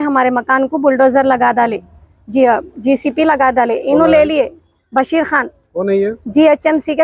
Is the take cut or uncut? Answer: uncut